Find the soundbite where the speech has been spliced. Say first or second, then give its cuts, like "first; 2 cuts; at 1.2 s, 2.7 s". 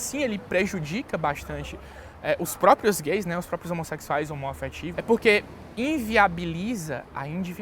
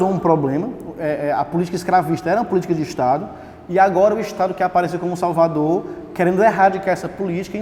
first; 1 cut; at 4.8 s